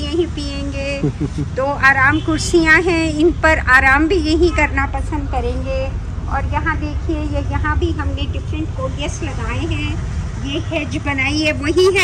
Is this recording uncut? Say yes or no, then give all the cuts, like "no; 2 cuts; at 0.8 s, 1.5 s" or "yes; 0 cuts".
yes; 0 cuts